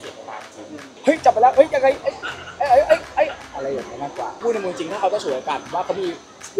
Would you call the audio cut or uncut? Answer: cut